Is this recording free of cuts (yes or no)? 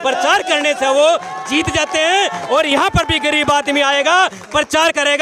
yes